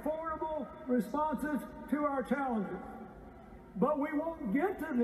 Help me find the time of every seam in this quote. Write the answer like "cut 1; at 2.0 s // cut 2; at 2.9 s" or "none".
cut 1; at 2.8 s